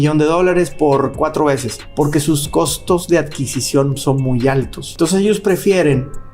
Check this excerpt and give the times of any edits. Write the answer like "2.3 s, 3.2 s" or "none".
1.8 s, 4.8 s